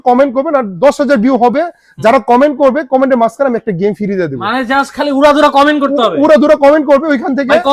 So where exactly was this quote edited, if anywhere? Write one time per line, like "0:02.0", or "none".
none